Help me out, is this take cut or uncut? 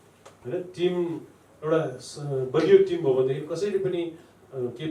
uncut